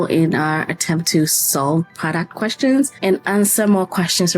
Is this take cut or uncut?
cut